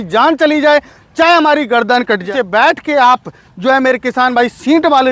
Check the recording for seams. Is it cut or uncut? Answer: cut